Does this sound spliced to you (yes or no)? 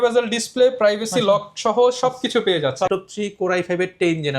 yes